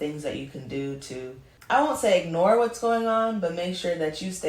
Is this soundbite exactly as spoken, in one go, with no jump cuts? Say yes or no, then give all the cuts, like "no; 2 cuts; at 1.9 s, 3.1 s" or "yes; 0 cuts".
no; 1 cut; at 1.5 s